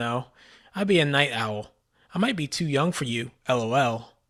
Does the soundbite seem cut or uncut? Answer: uncut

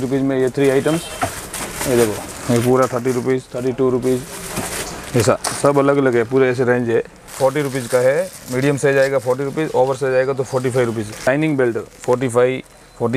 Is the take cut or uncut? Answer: cut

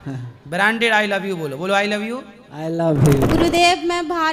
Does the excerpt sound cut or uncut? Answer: cut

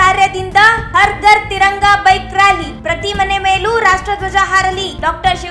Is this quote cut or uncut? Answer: uncut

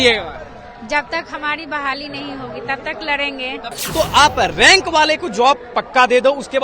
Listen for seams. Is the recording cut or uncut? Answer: cut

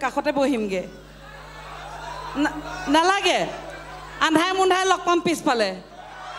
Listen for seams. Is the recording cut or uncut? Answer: uncut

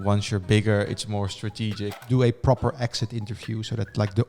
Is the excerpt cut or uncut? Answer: cut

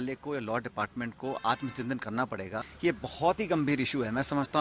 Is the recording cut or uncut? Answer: cut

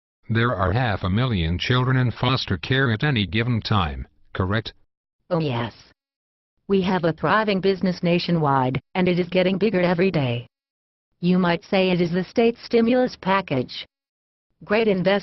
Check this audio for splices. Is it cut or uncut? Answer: cut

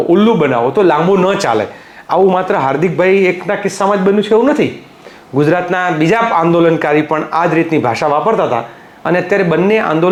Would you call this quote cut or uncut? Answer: uncut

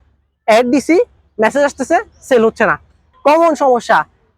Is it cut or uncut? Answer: cut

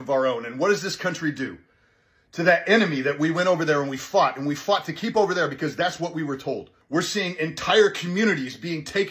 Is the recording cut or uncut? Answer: cut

